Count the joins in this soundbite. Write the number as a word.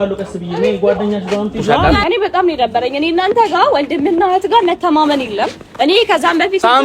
one